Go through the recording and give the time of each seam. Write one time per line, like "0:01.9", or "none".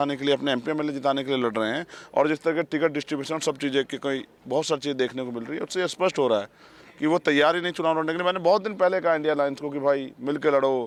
none